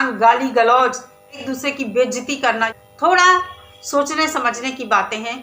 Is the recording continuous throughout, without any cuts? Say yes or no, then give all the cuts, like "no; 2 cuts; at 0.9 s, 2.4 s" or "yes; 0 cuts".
no; 2 cuts; at 1.4 s, 2.7 s